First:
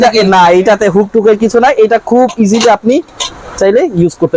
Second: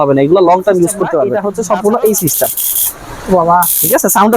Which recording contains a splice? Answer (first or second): second